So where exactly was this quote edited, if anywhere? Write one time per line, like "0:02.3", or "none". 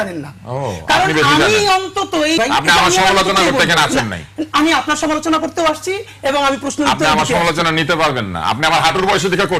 0:02.4

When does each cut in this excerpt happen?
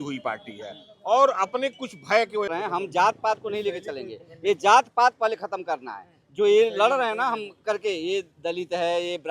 0:02.5

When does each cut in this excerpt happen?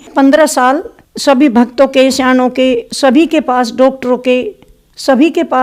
none

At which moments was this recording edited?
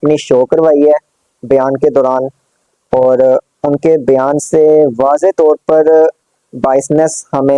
none

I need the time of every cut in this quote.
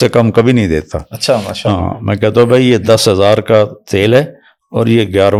none

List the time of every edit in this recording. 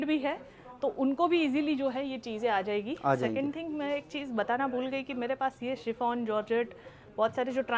none

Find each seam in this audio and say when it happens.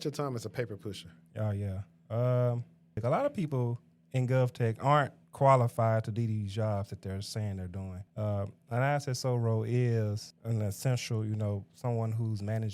0:02.9
0:08.0
0:10.3

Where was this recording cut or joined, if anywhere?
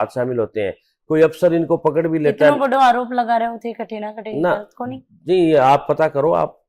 none

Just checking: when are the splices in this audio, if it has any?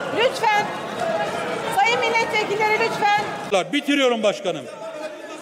0:03.4

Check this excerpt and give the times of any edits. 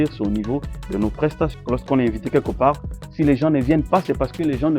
0:01.6

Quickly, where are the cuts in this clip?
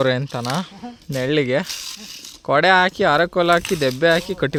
none

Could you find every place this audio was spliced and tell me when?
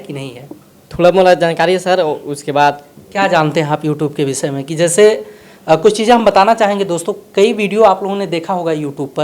none

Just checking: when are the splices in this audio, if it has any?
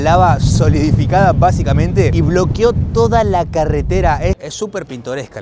0:04.4

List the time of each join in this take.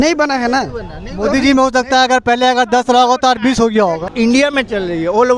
0:04.1

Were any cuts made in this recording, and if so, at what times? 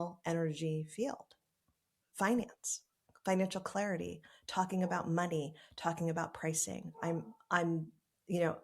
none

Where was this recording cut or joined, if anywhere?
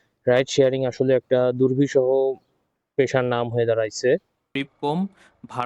0:04.5

